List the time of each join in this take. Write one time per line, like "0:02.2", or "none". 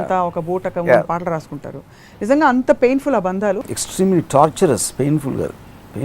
0:03.6